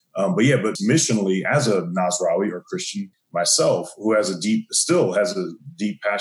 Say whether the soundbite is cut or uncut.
cut